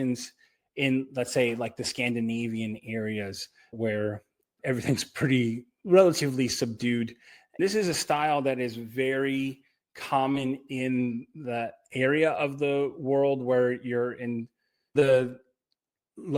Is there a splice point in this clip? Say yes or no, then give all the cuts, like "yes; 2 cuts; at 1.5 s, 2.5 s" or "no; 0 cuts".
yes; 1 cut; at 7.6 s